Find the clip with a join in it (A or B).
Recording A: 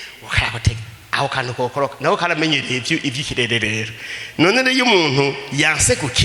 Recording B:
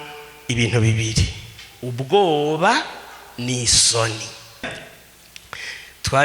B